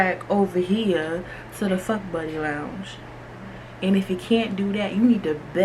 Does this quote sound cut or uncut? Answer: uncut